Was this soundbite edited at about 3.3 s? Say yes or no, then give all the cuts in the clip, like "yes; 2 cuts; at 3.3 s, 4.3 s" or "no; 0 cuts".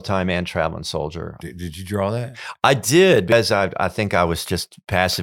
yes; 2 cuts; at 1.4 s, 3.3 s